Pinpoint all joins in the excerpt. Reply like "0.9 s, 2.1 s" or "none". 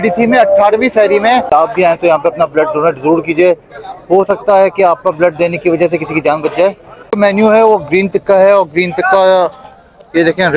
1.5 s, 7.2 s